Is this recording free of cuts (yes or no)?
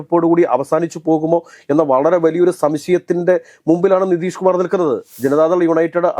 no